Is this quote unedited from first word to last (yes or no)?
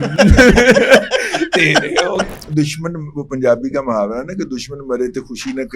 no